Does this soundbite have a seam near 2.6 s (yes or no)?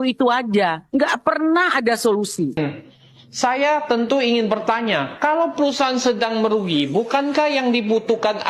yes